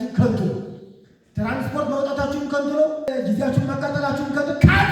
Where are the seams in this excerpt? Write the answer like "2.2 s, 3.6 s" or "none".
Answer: 3.1 s